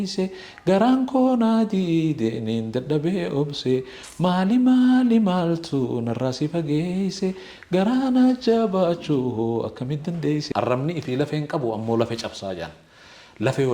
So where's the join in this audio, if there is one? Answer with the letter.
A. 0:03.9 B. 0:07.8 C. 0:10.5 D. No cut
C